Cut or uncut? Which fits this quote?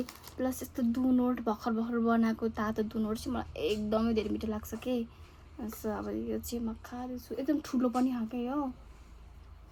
uncut